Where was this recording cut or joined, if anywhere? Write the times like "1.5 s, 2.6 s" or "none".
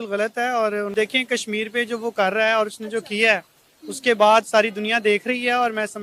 0.9 s